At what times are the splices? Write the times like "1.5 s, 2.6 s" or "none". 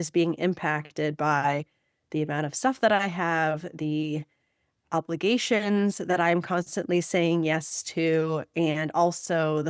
none